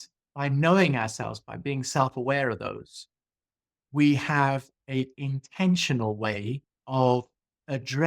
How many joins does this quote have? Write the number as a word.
two